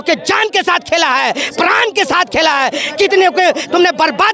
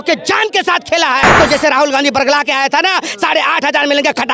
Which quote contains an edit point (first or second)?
second